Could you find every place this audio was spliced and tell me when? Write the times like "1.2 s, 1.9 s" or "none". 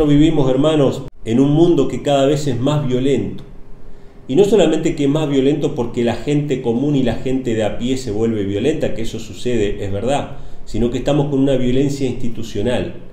1.1 s